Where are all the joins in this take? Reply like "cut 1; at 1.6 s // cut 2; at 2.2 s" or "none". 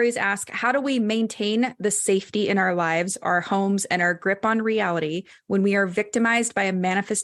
none

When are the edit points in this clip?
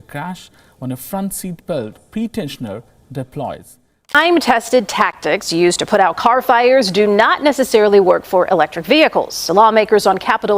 cut 1; at 4.1 s

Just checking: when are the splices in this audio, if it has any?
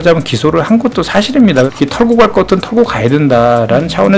cut 1; at 1.7 s

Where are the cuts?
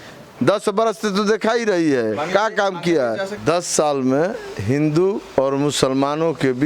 none

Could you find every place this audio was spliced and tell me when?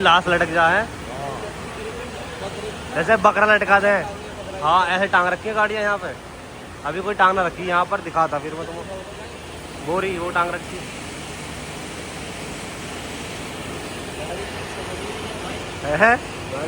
none

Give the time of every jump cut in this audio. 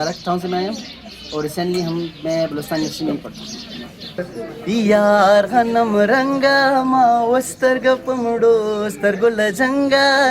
cut 1; at 4.2 s

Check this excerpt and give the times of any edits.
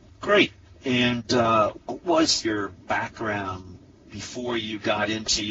none

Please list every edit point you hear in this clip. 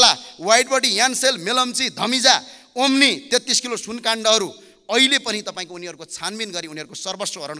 none

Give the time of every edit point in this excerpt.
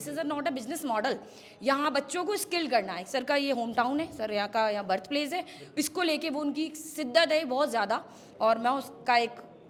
none

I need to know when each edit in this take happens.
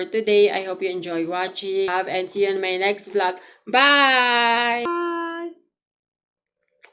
cut 1; at 1.9 s // cut 2; at 4.9 s

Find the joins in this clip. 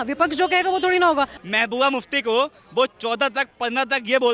cut 1; at 1.4 s

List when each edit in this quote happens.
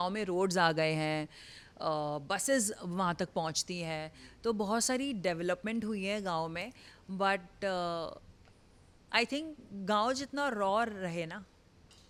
none

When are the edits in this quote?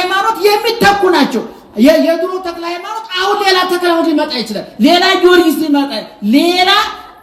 none

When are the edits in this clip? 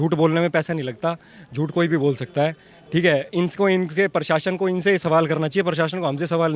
none

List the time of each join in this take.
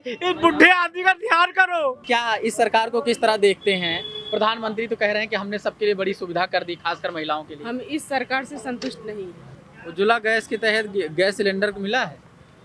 cut 1; at 2.0 s // cut 2; at 9.4 s

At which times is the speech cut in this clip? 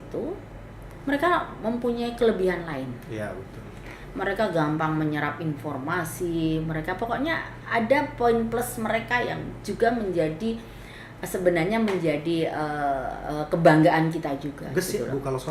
none

